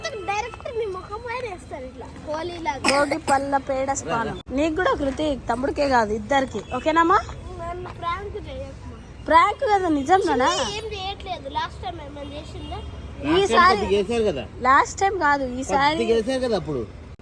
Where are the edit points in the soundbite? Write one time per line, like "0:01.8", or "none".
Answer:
0:04.4

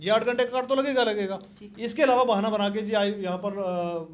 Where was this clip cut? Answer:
none

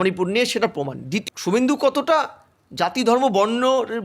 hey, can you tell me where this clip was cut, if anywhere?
0:01.2

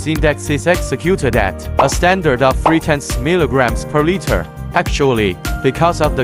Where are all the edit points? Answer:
none

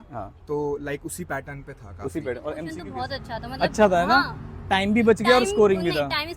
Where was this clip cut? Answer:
0:02.7

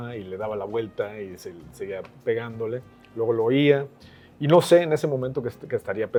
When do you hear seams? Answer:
none

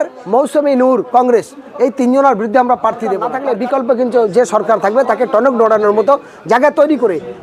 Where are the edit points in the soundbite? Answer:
0:03.3

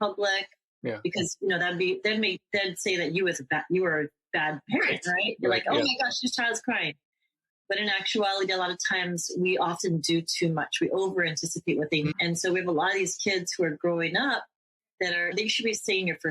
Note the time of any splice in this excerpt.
0:12.1
0:15.3

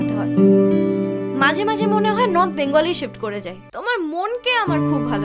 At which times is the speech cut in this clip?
0:03.6

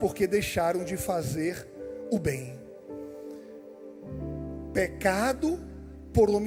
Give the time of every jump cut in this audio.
none

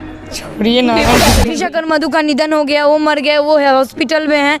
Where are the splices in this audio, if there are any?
0:01.5

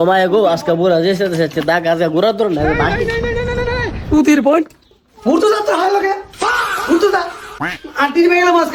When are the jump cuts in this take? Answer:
none

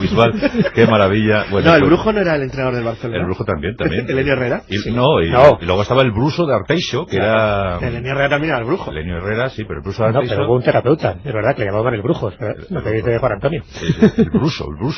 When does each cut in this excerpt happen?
none

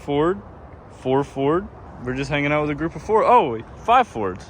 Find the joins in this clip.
0:01.8

